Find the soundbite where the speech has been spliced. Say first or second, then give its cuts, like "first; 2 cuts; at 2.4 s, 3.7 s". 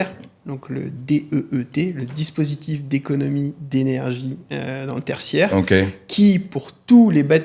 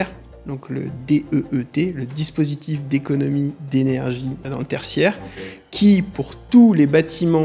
second; 1 cut; at 4.4 s